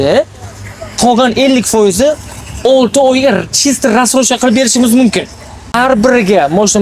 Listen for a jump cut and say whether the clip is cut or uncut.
cut